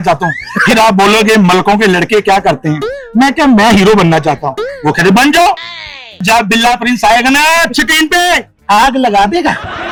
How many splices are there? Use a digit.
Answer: 0